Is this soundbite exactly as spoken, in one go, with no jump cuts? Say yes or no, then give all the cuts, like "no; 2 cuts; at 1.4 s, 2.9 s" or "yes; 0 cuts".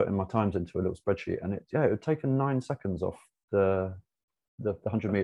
yes; 0 cuts